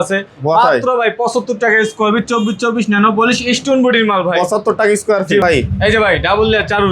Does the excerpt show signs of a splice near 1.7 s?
no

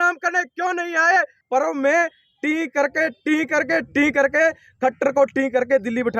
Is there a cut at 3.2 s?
no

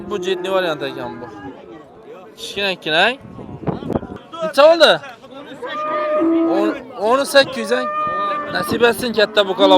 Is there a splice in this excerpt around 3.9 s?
yes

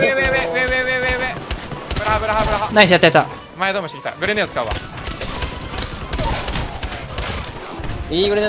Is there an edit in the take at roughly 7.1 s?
no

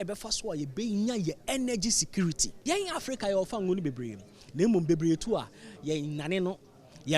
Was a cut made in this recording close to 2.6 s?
yes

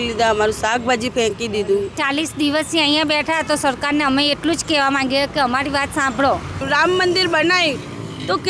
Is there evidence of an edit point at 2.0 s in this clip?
yes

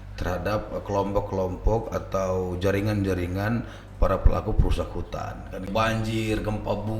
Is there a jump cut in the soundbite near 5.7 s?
yes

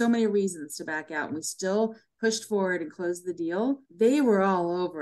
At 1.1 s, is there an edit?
no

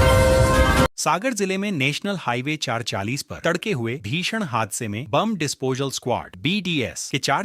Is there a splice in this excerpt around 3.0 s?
no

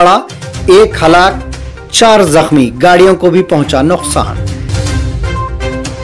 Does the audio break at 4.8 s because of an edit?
yes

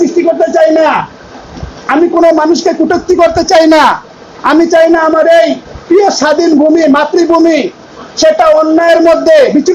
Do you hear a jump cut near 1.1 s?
no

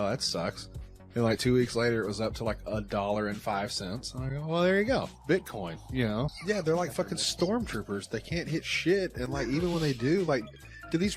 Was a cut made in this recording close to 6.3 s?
yes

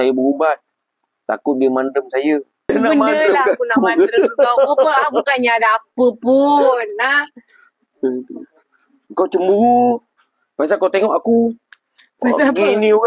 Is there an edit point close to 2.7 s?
yes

